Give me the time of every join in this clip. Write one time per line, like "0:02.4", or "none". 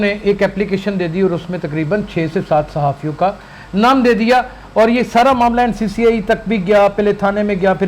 none